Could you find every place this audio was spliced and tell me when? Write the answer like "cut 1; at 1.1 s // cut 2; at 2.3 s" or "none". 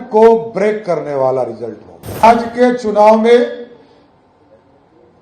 cut 1; at 2.2 s

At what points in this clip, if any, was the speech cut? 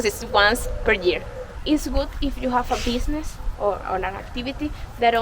cut 1; at 1.6 s

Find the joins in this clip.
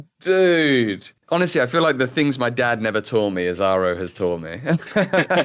cut 1; at 1.1 s

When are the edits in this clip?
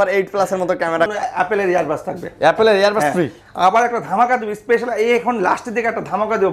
cut 1; at 1.1 s

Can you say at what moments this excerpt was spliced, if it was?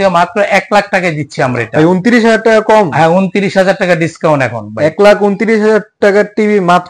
none

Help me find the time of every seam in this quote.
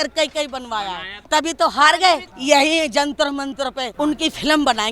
cut 1; at 1.1 s // cut 2; at 2.3 s // cut 3; at 3.8 s

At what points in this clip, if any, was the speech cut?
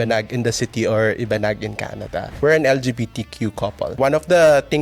cut 1; at 2.3 s // cut 2; at 4.0 s

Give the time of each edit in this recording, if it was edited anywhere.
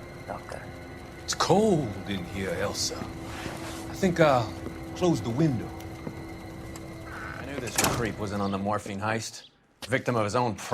cut 1; at 8.0 s

